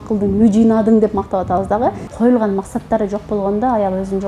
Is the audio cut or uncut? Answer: cut